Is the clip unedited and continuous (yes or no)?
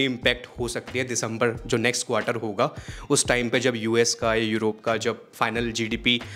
yes